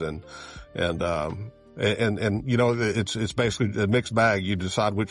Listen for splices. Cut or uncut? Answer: uncut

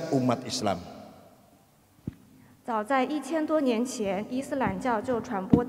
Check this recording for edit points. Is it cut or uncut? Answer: uncut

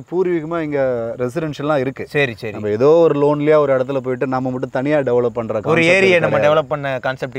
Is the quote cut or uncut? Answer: uncut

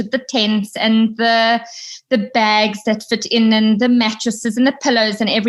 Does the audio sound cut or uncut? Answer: uncut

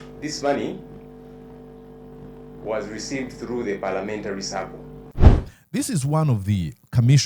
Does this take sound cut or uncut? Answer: cut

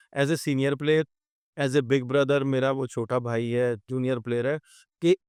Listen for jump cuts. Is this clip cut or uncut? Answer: uncut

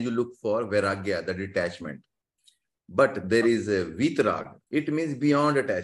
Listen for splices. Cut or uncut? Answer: cut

